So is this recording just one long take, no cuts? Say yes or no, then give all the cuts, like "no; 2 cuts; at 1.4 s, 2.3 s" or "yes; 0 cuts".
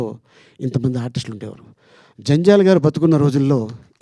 yes; 0 cuts